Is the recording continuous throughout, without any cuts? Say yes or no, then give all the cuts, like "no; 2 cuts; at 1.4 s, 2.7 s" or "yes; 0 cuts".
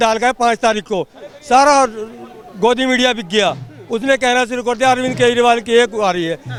yes; 0 cuts